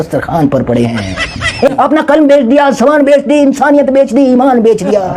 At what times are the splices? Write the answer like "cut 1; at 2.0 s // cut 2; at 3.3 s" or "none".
cut 1; at 1.7 s